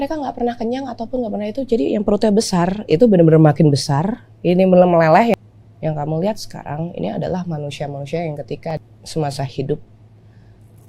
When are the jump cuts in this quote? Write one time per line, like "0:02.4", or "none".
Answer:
0:05.3
0:08.7